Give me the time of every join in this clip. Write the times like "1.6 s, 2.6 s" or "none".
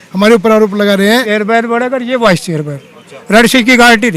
1.3 s